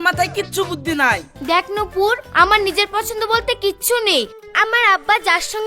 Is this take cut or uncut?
cut